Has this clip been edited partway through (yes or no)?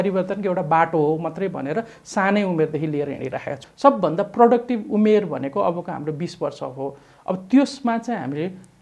yes